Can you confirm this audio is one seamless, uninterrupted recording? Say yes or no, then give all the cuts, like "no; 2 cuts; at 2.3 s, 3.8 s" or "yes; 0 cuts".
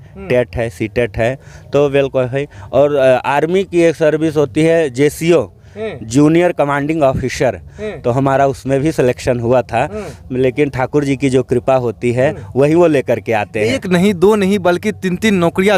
yes; 0 cuts